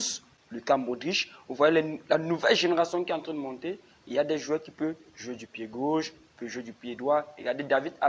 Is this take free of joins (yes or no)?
yes